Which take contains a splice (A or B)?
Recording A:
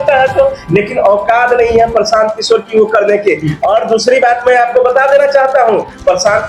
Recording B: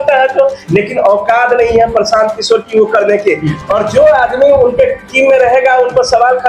B